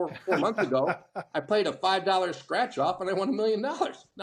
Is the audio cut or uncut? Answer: uncut